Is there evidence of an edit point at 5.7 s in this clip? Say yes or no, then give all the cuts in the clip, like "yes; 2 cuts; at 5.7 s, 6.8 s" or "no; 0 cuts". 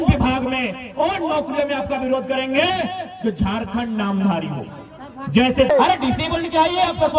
yes; 1 cut; at 5.7 s